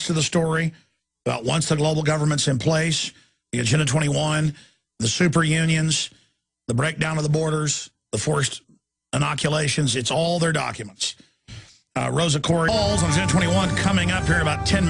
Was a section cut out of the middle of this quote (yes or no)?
no